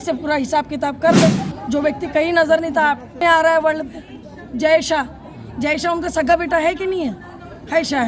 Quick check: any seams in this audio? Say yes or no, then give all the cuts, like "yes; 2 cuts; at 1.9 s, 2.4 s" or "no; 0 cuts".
yes; 1 cut; at 3.2 s